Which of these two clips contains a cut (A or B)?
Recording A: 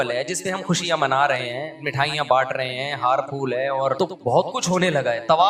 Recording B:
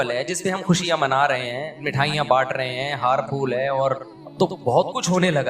A